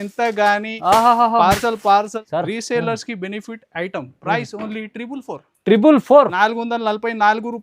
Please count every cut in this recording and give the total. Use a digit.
1